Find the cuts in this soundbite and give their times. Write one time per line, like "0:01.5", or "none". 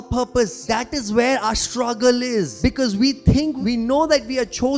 0:00.7
0:02.6
0:03.6